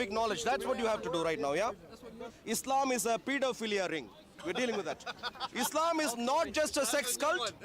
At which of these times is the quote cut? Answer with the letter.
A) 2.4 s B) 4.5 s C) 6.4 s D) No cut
A